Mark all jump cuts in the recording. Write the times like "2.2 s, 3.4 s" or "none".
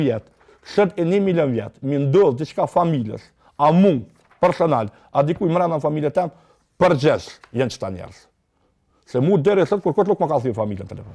none